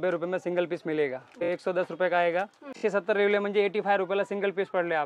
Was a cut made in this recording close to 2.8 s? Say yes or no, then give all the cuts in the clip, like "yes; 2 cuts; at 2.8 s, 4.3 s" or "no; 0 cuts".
yes; 2 cuts; at 1.5 s, 2.8 s